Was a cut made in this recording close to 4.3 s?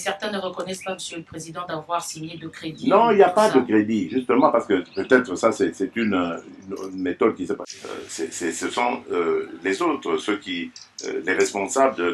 no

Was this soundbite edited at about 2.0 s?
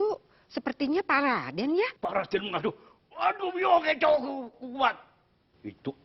yes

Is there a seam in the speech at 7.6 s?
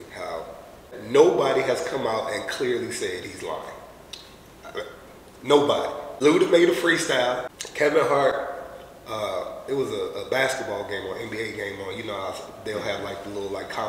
yes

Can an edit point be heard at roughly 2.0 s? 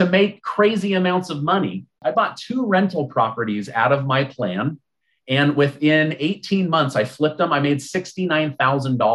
yes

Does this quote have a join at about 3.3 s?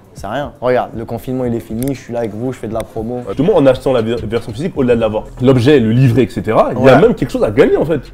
yes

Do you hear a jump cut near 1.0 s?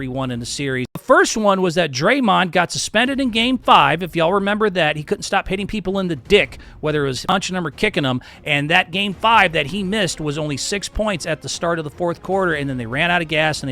yes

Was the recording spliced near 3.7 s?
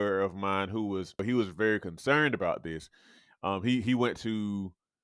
no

